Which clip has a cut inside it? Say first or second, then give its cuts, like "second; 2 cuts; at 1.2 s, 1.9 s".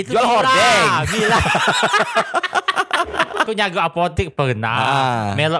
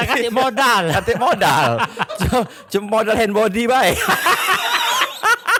first; 1 cut; at 3.5 s